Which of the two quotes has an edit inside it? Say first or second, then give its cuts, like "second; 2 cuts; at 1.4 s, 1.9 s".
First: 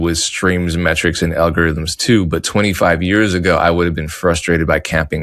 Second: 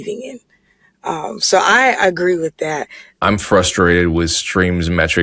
second; 1 cut; at 3.2 s